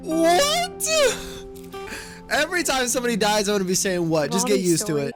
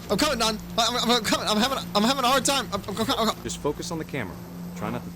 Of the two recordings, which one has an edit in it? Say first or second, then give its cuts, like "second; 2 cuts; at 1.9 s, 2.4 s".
second; 1 cut; at 3.5 s